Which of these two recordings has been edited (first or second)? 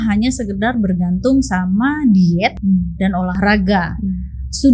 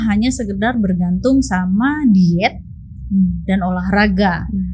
first